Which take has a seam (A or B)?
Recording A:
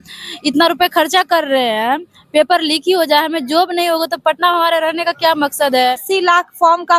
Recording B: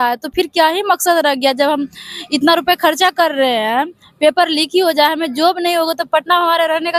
A